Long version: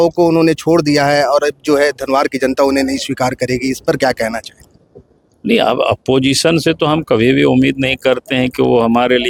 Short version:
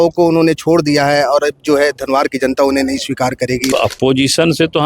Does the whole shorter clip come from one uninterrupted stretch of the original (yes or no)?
no